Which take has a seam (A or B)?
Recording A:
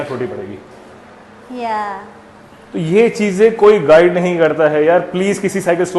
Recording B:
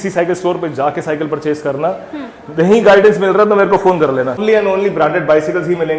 B